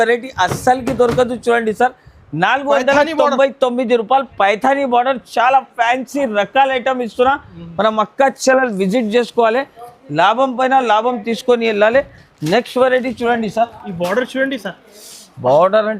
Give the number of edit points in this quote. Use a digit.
0